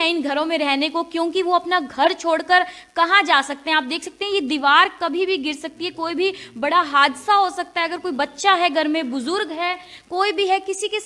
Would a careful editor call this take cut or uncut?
uncut